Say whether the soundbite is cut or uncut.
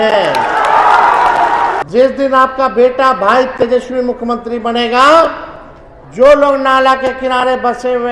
cut